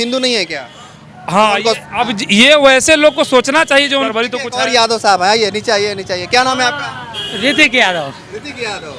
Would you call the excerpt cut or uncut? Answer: cut